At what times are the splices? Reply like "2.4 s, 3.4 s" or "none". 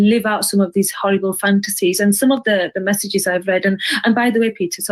none